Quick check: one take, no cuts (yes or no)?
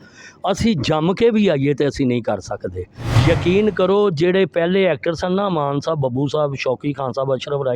no